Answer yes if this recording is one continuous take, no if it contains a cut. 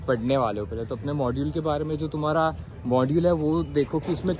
yes